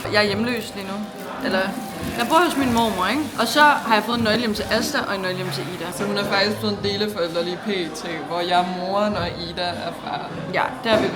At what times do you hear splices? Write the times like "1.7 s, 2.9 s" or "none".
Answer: none